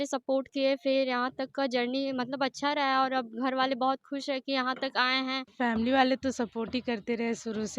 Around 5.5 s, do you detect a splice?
yes; 1 cut; at 5.5 s

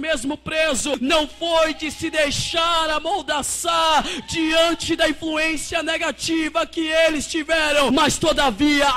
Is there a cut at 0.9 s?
yes; 2 cuts; at 0.9 s, 7.9 s

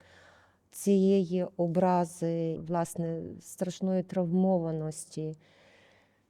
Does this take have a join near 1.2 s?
no; 1 cut; at 2.6 s

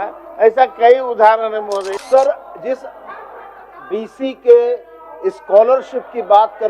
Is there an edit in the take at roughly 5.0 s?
no; 1 cut; at 2.0 s

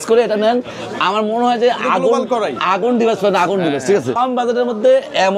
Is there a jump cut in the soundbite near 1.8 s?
no; 1 cut; at 4.2 s

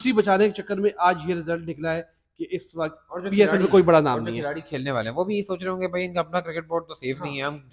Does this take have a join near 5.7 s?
no; 0 cuts

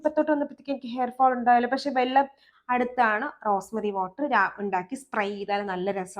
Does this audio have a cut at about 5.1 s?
no; 1 cut; at 2.4 s

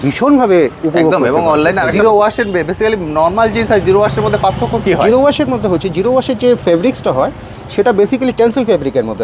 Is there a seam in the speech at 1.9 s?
yes; 1 cut; at 1.9 s

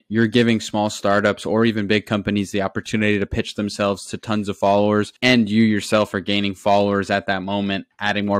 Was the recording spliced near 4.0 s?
no; 0 cuts

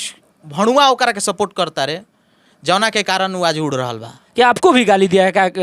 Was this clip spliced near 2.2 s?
no; 1 cut; at 4.2 s

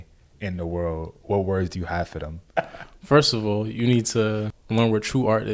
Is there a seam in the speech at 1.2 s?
no; 2 cuts; at 2.4 s, 4.6 s

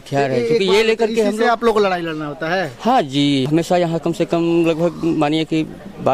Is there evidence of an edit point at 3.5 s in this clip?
yes; 1 cut; at 3.5 s

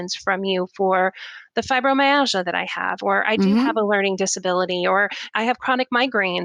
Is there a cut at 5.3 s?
yes; 1 cut; at 5.3 s

